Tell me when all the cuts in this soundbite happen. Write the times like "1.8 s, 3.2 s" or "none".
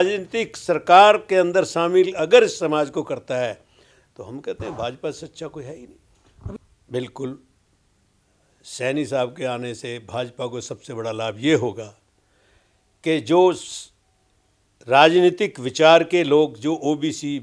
6.5 s